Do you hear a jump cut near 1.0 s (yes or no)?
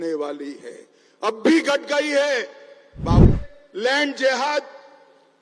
no